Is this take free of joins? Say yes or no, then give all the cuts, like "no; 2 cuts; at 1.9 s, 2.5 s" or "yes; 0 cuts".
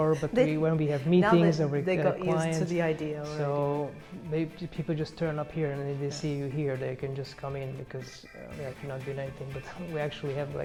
yes; 0 cuts